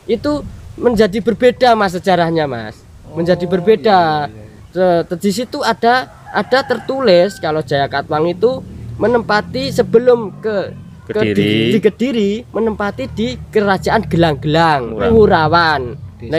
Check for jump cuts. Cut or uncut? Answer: cut